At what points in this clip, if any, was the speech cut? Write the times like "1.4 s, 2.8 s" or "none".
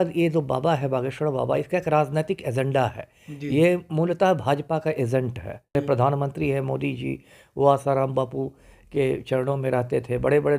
5.7 s